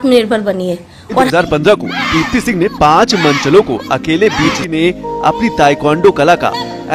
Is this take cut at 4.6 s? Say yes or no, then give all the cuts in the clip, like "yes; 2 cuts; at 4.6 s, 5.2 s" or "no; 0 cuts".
yes; 2 cuts; at 1.3 s, 4.6 s